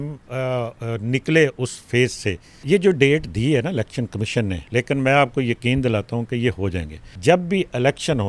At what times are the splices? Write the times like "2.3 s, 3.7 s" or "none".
2.5 s, 4.6 s, 7.1 s